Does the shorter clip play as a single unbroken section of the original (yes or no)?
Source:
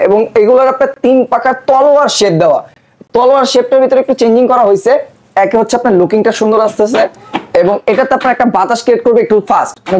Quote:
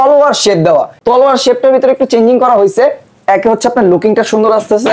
no